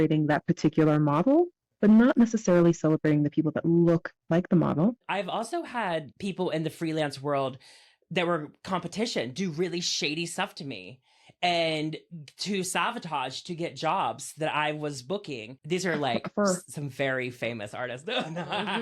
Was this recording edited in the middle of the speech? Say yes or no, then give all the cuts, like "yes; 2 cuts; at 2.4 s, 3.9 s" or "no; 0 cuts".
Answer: yes; 3 cuts; at 5.0 s, 6.1 s, 15.5 s